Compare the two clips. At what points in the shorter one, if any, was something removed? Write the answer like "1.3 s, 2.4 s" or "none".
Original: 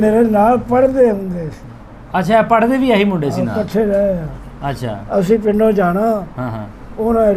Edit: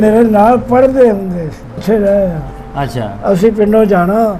1.8 s